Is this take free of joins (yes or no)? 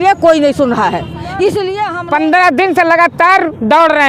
no